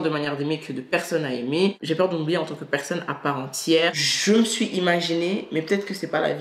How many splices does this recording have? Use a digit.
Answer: 2